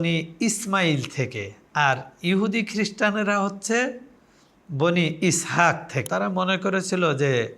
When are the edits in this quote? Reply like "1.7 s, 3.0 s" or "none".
6.1 s

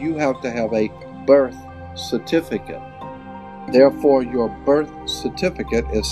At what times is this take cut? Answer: 3.2 s

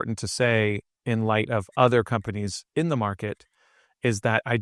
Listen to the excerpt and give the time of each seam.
none

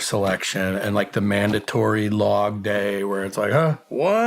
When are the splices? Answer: none

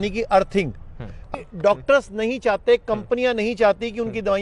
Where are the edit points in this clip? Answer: 1.3 s

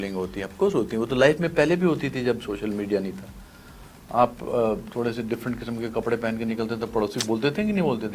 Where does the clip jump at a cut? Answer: none

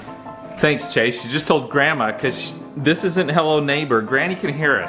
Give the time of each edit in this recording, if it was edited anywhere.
none

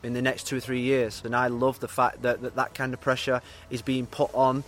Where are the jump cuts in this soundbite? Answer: 1.2 s

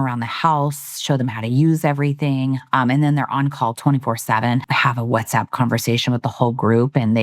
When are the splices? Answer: 4.7 s

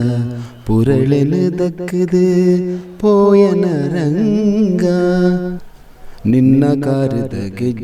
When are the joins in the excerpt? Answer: none

